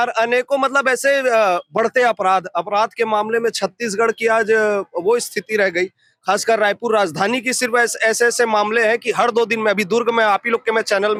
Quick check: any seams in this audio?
no; 0 cuts

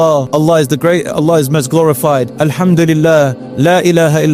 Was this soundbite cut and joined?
yes; 1 cut; at 2.3 s

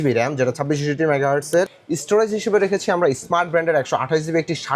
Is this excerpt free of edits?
no; 1 cut; at 1.8 s

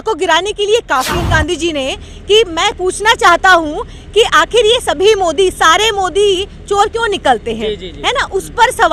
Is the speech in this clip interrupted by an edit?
yes; 1 cut; at 1.2 s

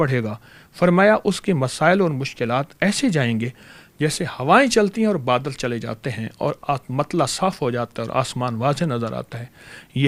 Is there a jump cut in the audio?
no; 0 cuts

